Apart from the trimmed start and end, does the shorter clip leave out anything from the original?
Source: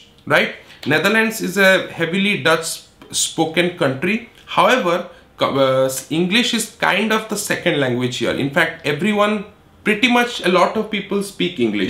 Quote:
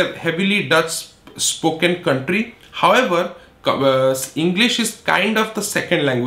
no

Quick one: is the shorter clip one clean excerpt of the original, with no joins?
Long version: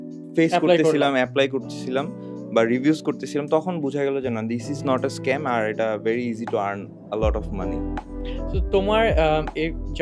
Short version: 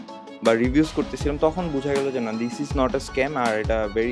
yes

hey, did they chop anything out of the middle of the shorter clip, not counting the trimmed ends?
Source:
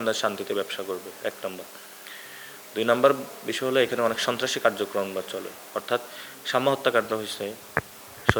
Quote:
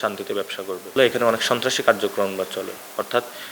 yes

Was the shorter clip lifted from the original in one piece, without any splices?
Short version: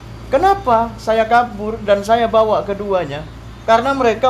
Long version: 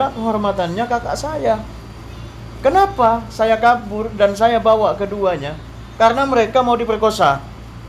yes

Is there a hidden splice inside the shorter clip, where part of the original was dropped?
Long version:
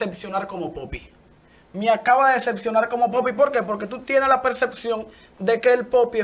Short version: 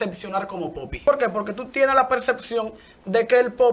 yes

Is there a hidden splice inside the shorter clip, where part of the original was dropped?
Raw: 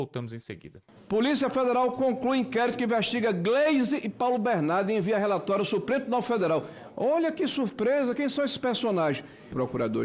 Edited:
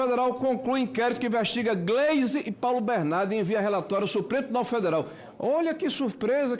no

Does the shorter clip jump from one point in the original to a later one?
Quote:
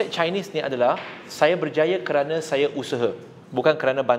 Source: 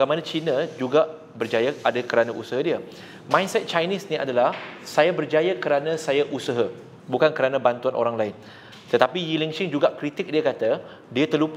no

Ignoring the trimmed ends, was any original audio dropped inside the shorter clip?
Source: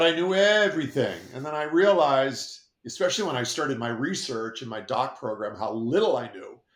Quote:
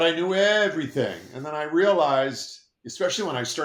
no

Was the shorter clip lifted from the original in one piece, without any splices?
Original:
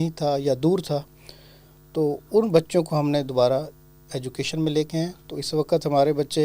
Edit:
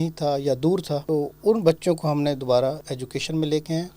no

